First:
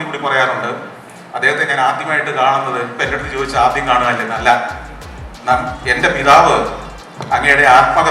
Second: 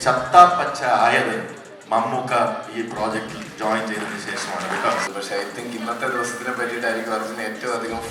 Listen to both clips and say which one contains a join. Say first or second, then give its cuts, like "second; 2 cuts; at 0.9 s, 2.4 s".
second; 1 cut; at 5.1 s